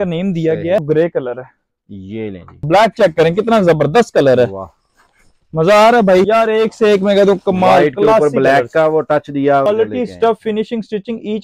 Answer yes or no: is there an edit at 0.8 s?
yes